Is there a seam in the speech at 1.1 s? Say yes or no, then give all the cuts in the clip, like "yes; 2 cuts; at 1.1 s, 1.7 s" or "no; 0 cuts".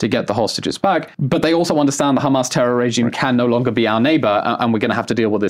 yes; 1 cut; at 1.1 s